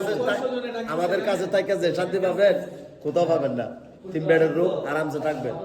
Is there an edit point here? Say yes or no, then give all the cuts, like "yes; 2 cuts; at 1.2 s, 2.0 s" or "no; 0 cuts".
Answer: no; 0 cuts